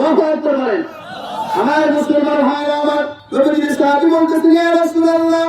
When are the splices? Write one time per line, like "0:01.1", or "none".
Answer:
0:03.2